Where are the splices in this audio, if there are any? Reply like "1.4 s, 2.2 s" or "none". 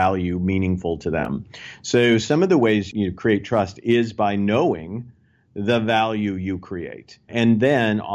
2.9 s, 7.3 s